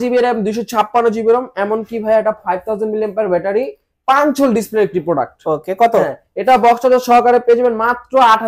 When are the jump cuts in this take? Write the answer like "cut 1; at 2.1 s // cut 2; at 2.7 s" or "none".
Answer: none